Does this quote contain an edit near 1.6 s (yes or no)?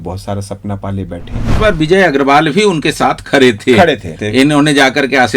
yes